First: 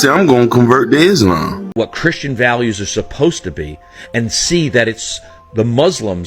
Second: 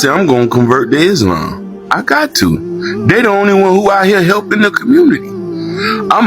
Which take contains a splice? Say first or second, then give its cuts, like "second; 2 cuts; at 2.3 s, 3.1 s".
first; 1 cut; at 1.8 s